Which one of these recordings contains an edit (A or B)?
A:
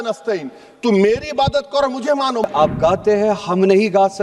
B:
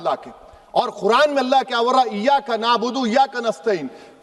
A